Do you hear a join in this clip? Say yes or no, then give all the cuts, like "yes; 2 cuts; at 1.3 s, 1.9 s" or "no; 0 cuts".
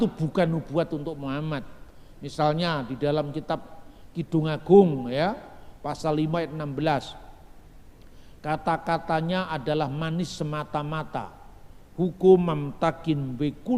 no; 0 cuts